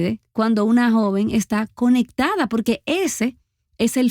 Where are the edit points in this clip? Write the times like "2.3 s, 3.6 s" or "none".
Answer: none

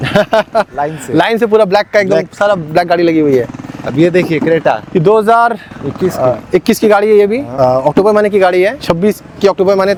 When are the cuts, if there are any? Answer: none

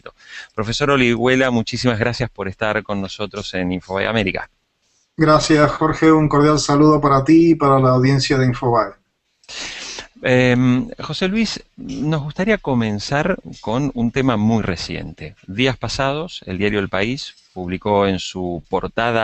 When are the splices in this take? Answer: 9.0 s

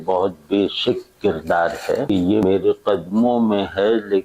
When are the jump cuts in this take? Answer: 2.4 s

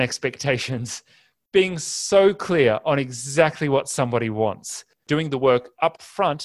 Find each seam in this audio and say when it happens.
5.0 s

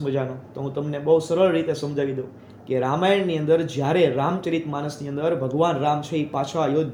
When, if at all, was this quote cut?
none

